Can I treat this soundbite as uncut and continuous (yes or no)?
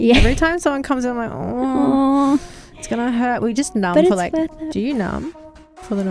no